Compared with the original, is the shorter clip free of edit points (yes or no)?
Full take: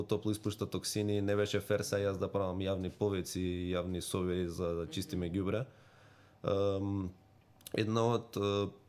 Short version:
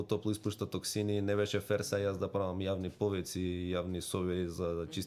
yes